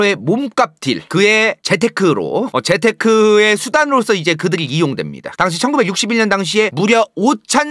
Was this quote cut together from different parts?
no; 0 cuts

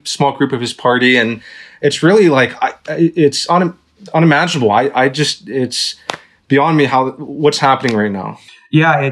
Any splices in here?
no; 0 cuts

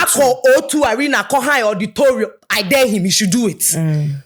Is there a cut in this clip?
no; 0 cuts

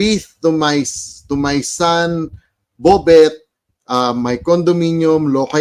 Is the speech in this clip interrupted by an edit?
no; 0 cuts

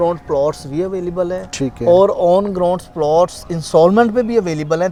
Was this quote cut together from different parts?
no; 0 cuts

